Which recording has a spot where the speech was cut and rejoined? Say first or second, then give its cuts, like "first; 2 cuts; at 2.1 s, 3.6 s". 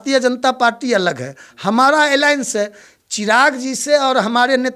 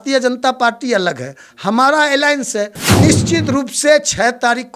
second; 1 cut; at 2.8 s